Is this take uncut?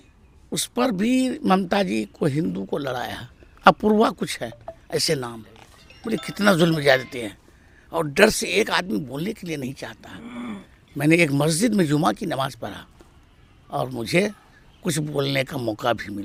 yes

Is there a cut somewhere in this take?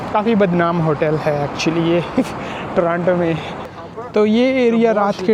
yes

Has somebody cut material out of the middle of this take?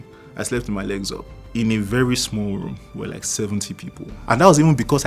yes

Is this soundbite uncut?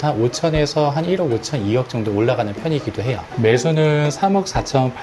no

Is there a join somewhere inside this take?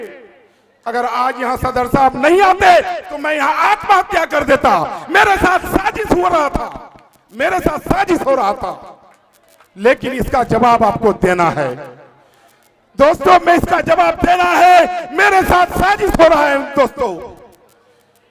no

